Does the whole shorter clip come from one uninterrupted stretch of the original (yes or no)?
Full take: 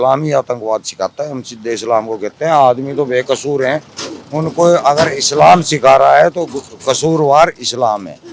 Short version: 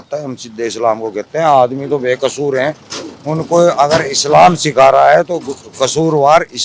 yes